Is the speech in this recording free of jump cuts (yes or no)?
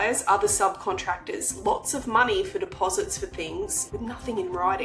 no